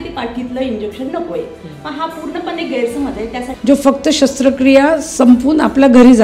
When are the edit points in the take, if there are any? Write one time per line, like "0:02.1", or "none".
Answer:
0:03.5

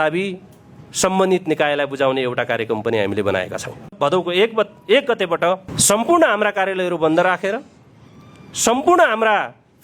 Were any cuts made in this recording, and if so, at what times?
0:03.9
0:05.7

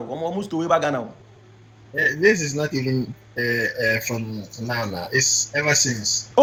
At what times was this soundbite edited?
none

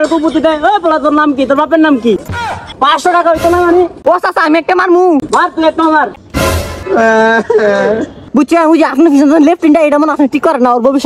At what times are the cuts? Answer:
0:02.4
0:05.3
0:08.2

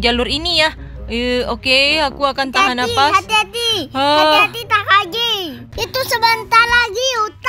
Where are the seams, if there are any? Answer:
0:05.7

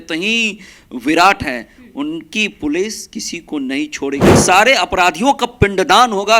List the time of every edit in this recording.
0:04.4

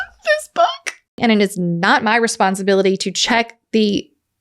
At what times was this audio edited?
0:01.1

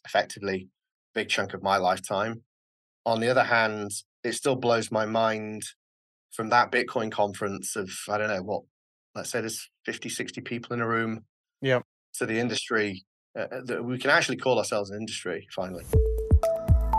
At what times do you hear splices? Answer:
0:15.8

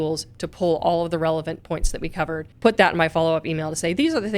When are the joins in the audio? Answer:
0:02.5

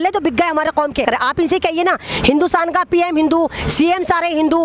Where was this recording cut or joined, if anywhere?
0:01.0

